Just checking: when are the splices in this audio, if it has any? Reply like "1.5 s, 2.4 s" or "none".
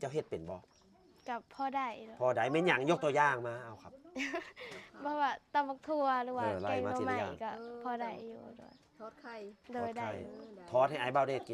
none